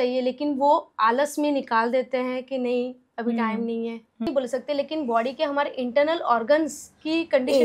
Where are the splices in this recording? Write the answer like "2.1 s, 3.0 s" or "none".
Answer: 4.3 s